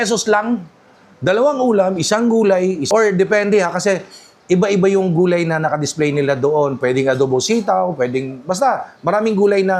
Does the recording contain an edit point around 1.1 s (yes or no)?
no